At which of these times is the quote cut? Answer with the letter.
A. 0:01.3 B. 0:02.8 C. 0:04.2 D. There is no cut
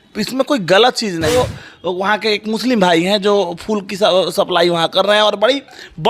A